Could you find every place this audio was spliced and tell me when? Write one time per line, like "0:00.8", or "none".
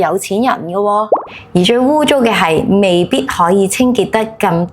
0:01.2